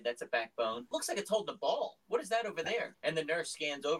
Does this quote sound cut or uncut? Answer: cut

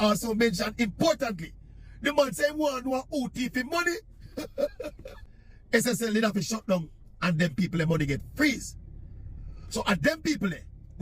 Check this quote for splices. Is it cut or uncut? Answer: uncut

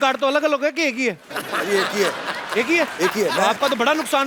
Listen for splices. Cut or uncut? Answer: uncut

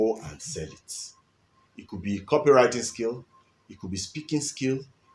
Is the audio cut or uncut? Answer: uncut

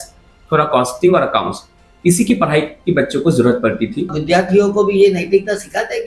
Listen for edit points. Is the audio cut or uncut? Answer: cut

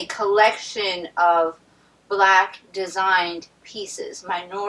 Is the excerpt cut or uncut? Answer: uncut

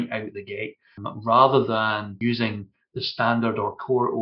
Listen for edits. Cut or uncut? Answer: cut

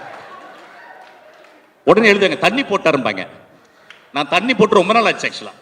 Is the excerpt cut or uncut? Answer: uncut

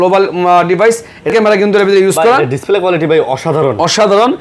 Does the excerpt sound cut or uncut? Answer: cut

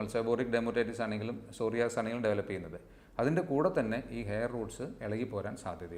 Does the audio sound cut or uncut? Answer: uncut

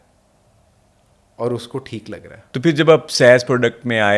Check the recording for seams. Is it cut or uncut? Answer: cut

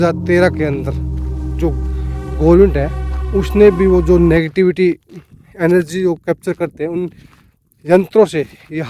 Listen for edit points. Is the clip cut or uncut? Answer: uncut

